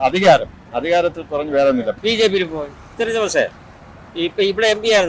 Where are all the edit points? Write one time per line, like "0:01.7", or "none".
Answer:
0:02.0
0:02.9

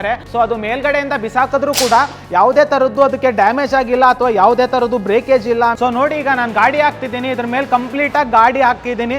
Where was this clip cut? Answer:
0:05.8

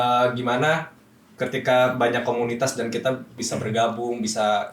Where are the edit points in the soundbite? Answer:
0:03.4

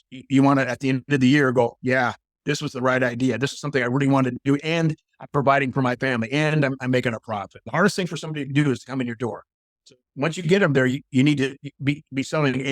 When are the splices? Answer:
0:07.6

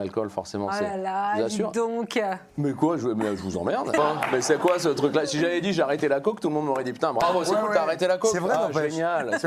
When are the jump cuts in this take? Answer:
0:02.5
0:04.0
0:07.2

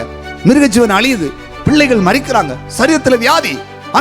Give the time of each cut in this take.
none

